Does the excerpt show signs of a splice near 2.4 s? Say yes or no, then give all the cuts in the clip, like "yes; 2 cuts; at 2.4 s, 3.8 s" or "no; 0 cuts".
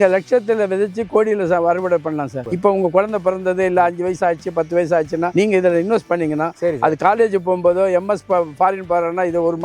yes; 1 cut; at 2.4 s